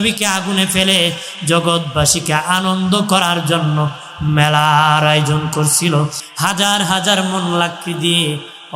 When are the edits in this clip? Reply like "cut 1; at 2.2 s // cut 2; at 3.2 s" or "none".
cut 1; at 6.2 s